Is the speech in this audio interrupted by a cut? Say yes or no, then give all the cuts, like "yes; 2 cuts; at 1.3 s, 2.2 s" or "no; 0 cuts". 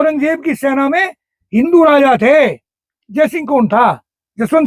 no; 0 cuts